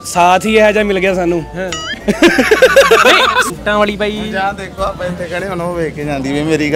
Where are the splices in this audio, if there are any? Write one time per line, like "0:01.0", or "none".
0:03.4